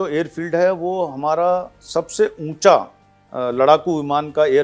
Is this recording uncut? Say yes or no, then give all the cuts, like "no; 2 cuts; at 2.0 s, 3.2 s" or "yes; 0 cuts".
yes; 0 cuts